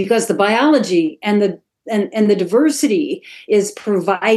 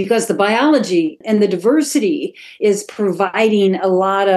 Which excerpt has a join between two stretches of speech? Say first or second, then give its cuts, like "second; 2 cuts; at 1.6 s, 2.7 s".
second; 1 cut; at 1.2 s